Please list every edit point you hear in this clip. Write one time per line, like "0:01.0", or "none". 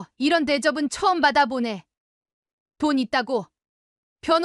none